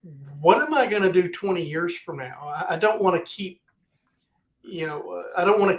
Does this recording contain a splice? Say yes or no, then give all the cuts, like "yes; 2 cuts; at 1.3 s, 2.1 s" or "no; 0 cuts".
no; 0 cuts